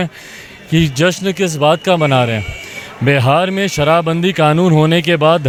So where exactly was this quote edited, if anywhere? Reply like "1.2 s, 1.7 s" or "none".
none